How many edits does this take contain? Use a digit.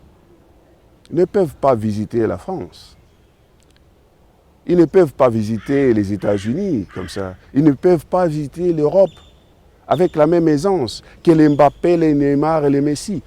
0